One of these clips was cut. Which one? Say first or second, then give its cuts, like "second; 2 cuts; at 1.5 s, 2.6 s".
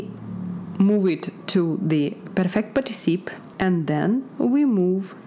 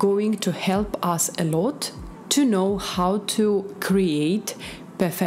first; 1 cut; at 3.4 s